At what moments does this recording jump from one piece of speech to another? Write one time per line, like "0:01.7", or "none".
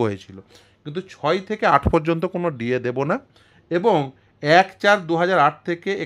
none